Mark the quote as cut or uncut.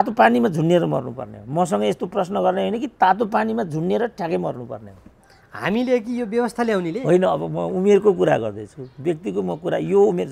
uncut